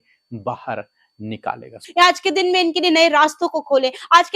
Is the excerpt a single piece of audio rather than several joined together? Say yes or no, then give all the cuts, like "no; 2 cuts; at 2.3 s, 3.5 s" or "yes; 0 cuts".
no; 1 cut; at 1.8 s